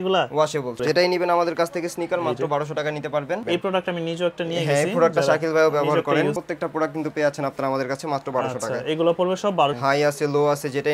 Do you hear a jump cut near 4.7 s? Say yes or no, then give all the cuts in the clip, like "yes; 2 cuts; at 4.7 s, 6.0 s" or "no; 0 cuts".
no; 4 cuts; at 0.8 s, 3.4 s, 6.4 s, 9.8 s